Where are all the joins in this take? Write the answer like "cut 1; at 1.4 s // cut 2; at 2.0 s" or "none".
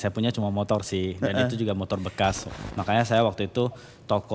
cut 1; at 2.5 s